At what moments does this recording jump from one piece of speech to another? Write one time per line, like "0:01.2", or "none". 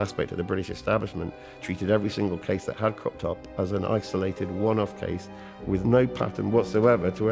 none